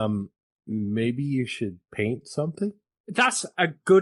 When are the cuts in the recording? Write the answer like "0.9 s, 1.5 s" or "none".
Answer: none